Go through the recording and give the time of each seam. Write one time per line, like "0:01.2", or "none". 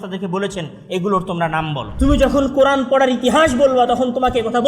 0:01.8